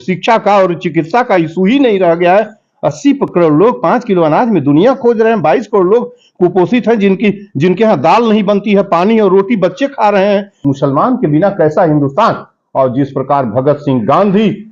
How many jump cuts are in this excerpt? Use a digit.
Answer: 1